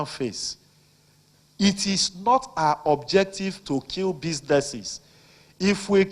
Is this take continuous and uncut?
no; 1 cut; at 3.6 s

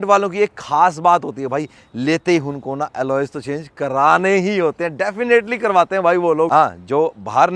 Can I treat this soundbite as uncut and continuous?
yes; 0 cuts

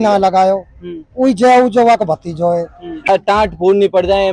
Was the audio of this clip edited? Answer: yes; 1 cut; at 3.1 s

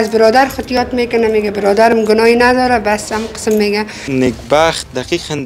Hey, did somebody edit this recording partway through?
yes; 1 cut; at 4.1 s

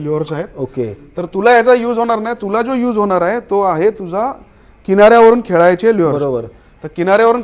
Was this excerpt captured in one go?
yes; 0 cuts

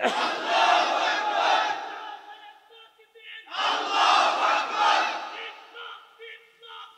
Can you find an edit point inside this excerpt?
no; 0 cuts

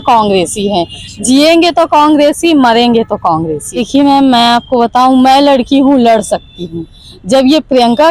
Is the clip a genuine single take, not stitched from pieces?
no; 1 cut; at 3.8 s

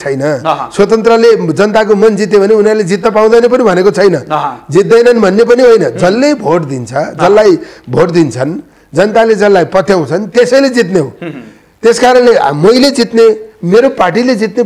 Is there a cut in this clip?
no; 0 cuts

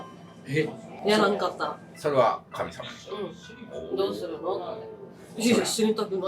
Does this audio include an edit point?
no; 0 cuts

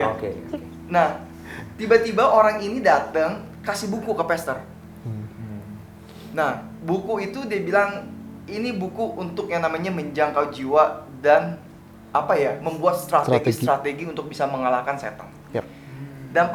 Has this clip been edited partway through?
no; 0 cuts

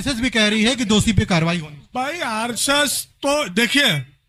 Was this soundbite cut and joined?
no; 0 cuts

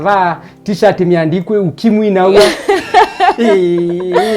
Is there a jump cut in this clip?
yes; 1 cut; at 2.4 s

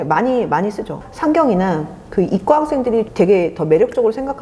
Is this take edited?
yes; 2 cuts; at 1.0 s, 3.1 s

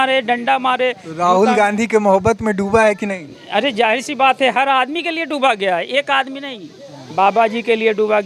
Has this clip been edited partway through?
no; 0 cuts

